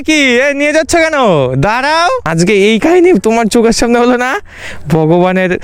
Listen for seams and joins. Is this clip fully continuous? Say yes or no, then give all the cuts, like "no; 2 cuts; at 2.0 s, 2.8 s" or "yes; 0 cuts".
no; 1 cut; at 2.3 s